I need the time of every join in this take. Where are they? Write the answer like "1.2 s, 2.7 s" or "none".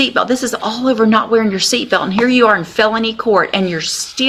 none

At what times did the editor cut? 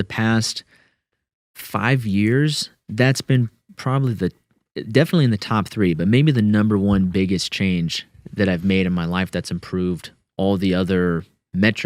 none

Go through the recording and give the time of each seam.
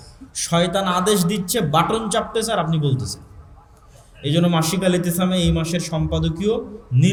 none

